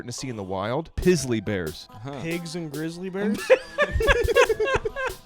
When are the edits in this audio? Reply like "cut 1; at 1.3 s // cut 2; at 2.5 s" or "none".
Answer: cut 1; at 0.9 s // cut 2; at 1.9 s